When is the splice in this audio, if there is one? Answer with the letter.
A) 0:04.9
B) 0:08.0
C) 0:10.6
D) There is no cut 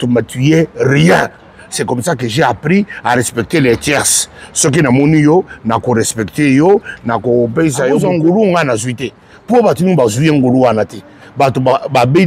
B